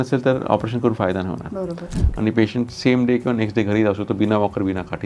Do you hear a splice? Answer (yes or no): yes